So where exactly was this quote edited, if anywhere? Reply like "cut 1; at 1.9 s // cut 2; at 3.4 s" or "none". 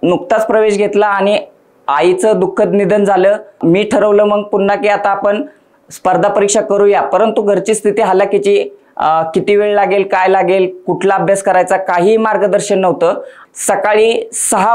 cut 1; at 3.6 s // cut 2; at 13.4 s

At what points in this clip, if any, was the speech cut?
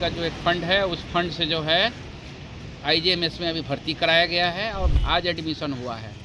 cut 1; at 4.9 s

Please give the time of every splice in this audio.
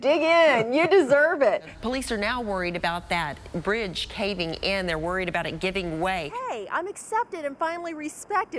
cut 1; at 1.8 s // cut 2; at 6.3 s

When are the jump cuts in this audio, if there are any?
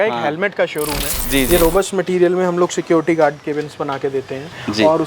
cut 1; at 1.2 s

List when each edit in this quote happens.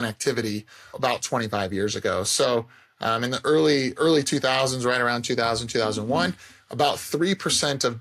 cut 1; at 0.9 s

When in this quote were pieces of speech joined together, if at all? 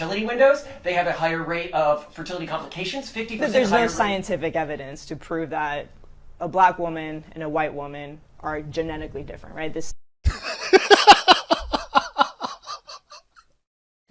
none

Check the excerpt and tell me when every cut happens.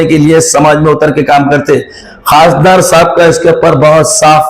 cut 1; at 2.0 s

